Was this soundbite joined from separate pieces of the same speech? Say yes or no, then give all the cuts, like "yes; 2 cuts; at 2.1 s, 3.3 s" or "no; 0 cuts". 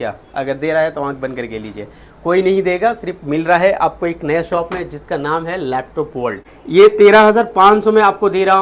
yes; 1 cut; at 6.5 s